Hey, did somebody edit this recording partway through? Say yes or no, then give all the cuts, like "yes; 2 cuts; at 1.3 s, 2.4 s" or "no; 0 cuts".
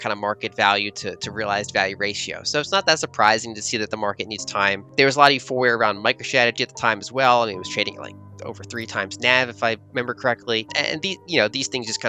yes; 2 cuts; at 4.9 s, 10.7 s